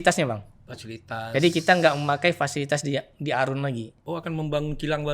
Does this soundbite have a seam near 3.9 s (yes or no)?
yes